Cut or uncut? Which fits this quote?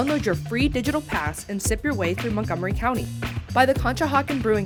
uncut